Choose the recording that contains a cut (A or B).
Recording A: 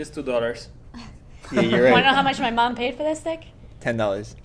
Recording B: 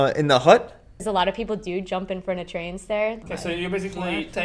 B